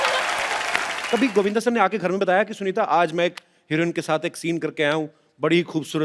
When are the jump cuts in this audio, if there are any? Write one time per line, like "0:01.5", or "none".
0:00.9

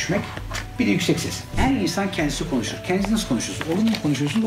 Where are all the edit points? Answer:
0:01.5

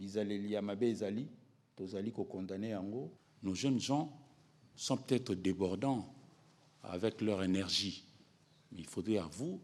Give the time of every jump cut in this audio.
0:03.2

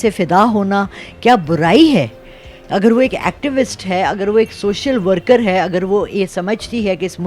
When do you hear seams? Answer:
none

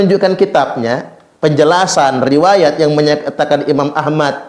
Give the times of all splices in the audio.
none

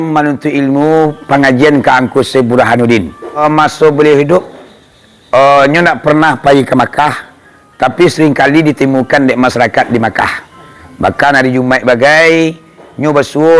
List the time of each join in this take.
0:03.4

